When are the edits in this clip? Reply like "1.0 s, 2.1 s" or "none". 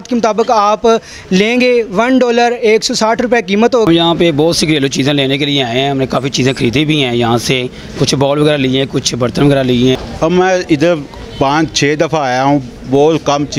3.9 s, 10.0 s